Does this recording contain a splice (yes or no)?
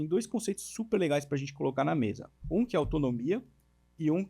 yes